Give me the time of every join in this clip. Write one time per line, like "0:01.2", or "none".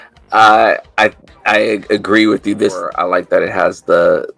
0:03.0